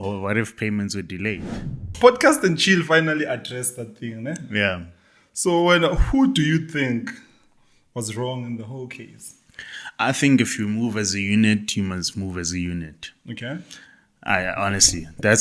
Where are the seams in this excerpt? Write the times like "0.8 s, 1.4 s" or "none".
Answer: 1.9 s